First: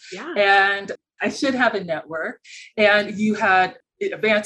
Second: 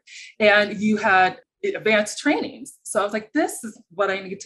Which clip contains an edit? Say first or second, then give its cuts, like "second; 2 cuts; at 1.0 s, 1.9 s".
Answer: first; 1 cut; at 1.0 s